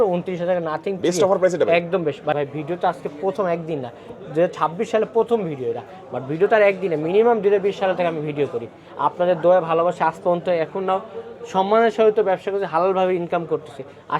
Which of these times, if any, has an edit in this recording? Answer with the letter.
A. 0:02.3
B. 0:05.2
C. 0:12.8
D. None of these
A